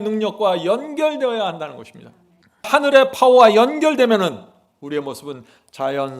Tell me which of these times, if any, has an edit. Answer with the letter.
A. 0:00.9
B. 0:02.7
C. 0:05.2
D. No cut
B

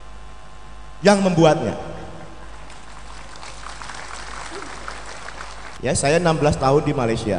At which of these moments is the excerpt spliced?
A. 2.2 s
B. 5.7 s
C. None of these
B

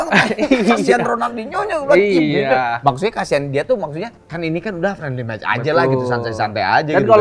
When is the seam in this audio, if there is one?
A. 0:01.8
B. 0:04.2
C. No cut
B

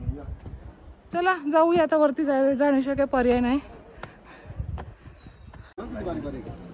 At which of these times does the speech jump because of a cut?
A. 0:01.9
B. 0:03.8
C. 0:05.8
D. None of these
C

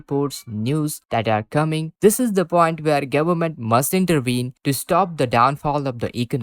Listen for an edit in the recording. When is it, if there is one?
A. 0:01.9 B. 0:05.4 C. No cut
A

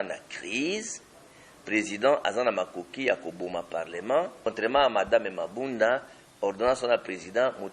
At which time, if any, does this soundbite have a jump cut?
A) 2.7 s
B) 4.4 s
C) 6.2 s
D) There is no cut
B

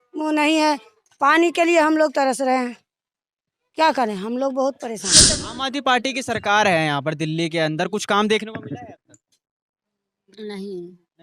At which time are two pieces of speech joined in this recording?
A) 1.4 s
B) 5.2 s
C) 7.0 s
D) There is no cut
B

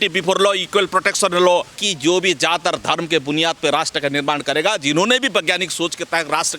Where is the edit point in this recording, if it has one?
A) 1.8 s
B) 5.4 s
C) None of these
A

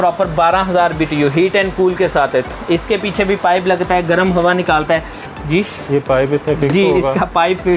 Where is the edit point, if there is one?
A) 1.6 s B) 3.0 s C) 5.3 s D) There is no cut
C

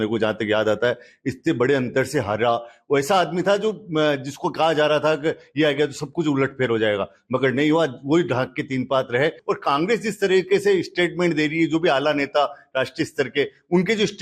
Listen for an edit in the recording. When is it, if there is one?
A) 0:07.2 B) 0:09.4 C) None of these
B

